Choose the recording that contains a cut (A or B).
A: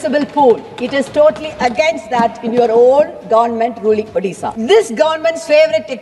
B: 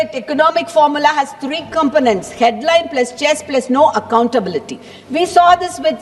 A